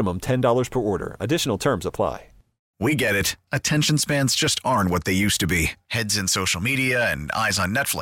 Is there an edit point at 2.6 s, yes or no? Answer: yes